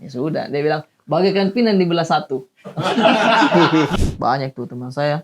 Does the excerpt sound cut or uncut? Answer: cut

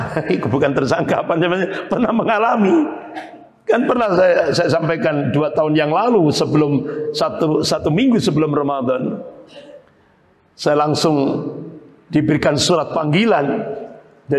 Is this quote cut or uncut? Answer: uncut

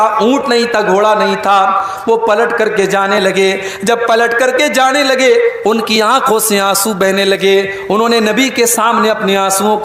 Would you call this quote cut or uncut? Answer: uncut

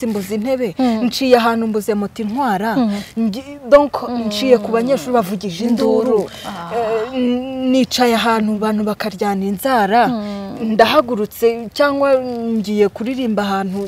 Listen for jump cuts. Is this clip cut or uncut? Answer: uncut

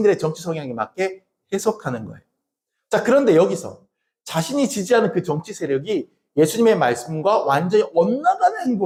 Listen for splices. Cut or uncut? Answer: uncut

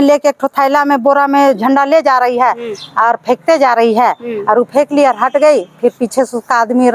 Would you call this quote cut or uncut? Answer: uncut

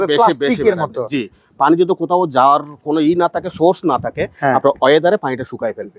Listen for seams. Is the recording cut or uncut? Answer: uncut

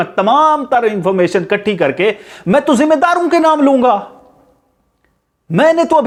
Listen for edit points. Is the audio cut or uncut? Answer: uncut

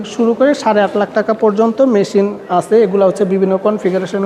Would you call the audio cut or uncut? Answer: uncut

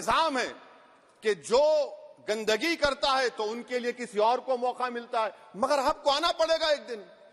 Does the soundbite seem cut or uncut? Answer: uncut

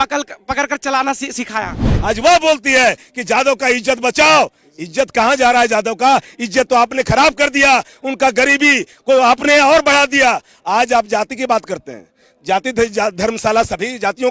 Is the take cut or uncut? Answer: cut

